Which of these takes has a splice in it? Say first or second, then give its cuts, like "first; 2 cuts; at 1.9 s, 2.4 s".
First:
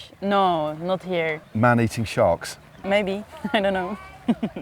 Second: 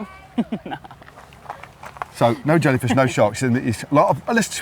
first; 2 cuts; at 1.4 s, 2.8 s